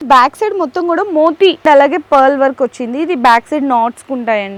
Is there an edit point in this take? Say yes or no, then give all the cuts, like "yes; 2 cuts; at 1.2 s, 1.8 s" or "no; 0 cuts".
no; 0 cuts